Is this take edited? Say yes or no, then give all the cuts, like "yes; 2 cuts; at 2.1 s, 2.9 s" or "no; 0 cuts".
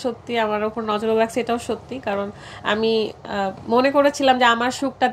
no; 0 cuts